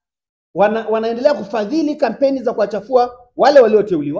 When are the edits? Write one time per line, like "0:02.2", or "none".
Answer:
none